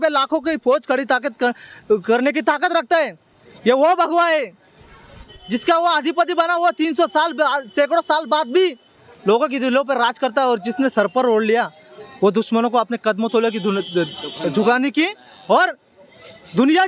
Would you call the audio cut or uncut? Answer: uncut